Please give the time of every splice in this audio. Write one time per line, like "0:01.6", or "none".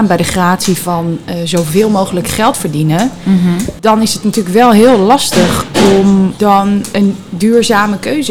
0:06.9